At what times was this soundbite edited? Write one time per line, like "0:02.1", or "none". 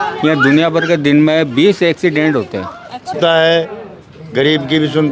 0:03.1